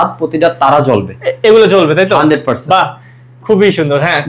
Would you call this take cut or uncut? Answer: uncut